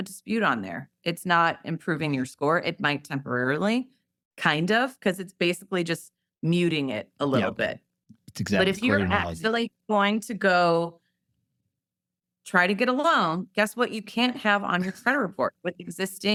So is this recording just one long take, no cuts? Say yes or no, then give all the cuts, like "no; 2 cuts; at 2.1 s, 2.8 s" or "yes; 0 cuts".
yes; 0 cuts